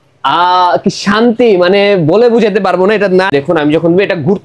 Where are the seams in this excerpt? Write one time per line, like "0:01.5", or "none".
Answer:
0:03.3

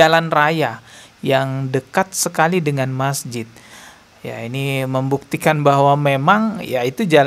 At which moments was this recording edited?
none

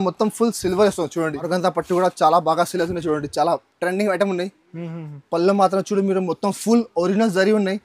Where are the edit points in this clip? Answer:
0:01.4

